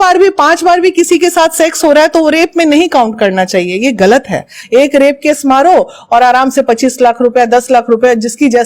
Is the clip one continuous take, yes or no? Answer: no